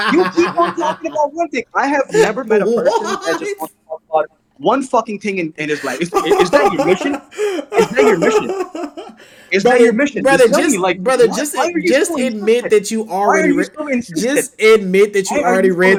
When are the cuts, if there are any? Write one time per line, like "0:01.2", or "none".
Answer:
none